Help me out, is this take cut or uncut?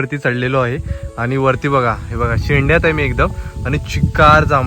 uncut